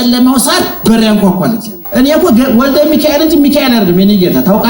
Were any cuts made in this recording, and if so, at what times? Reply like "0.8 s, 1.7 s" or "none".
1.8 s